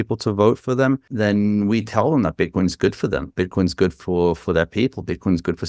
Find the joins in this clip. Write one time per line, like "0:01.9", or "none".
0:01.1